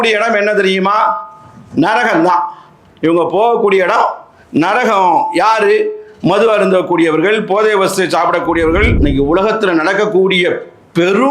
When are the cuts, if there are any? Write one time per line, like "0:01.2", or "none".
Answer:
0:08.9